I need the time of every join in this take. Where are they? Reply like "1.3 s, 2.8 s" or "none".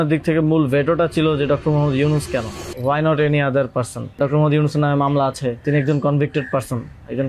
2.6 s, 4.2 s, 5.6 s